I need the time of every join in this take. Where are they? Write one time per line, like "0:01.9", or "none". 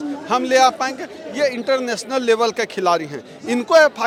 none

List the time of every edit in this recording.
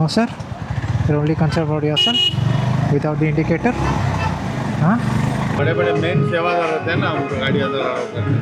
0:05.6

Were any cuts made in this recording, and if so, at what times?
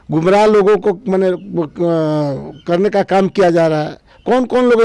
none

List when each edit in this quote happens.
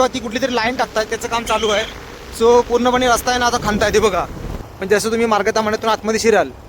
0:04.6

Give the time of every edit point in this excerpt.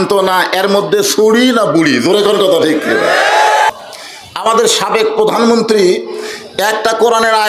0:03.7

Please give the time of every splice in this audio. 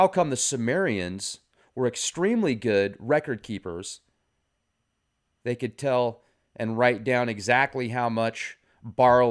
0:06.1

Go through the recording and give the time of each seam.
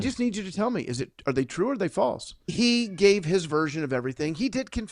0:02.4

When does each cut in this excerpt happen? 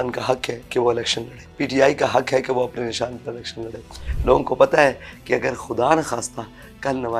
0:01.4
0:04.0

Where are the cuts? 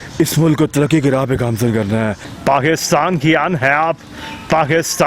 0:02.3

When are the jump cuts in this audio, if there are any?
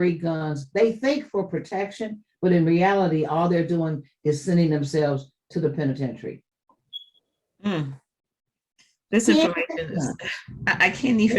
none

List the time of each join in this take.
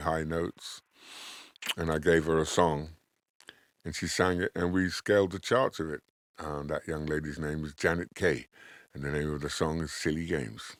none

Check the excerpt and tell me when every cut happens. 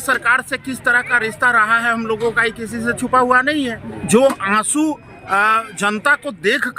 0:04.0

